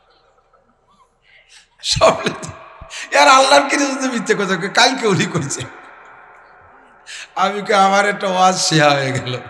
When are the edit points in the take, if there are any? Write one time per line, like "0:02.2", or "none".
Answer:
none